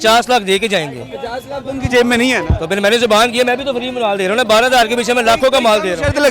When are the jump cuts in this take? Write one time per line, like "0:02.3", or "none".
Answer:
none